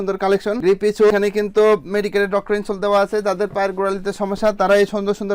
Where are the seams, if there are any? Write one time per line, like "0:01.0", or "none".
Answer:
none

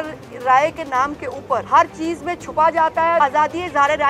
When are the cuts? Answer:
0:01.6
0:03.2

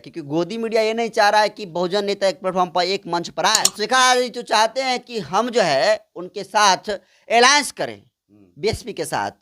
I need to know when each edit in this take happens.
0:03.7

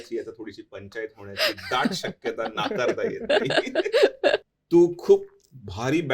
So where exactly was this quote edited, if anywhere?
0:04.5

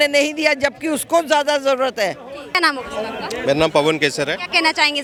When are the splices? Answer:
none

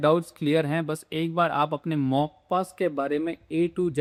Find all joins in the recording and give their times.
none

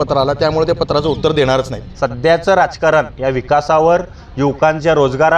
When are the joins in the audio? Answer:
0:01.8

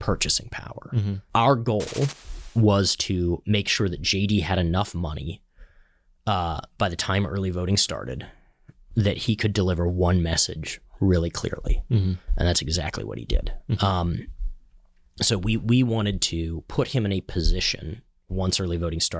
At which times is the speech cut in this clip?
0:01.2

